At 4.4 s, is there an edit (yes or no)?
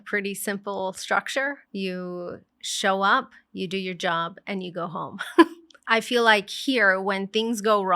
no